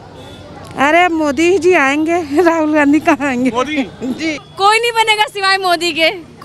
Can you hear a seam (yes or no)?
yes